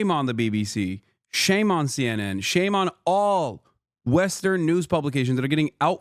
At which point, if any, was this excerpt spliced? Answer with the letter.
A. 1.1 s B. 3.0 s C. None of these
C